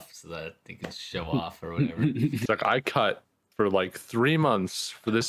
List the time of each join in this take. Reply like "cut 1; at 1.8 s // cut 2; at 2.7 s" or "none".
cut 1; at 2.4 s